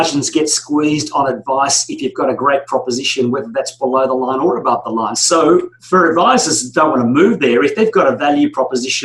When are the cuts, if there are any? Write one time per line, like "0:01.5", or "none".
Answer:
0:05.2